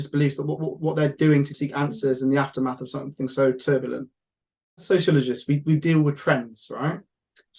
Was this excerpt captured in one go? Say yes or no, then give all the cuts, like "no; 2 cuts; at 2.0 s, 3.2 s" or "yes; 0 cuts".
no; 2 cuts; at 1.6 s, 4.8 s